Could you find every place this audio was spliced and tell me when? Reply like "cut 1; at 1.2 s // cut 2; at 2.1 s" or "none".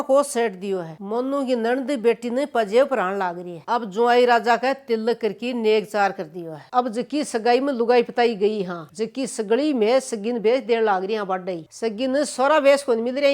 cut 1; at 0.9 s // cut 2; at 3.5 s // cut 3; at 6.6 s // cut 4; at 11.6 s